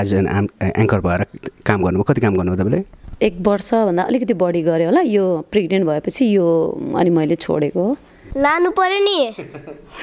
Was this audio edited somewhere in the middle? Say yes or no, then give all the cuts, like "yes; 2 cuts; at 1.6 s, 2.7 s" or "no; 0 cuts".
yes; 1 cut; at 8.2 s